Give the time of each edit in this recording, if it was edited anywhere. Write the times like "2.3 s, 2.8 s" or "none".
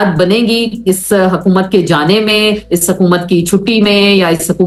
none